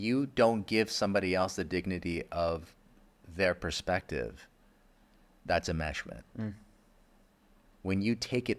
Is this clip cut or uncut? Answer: uncut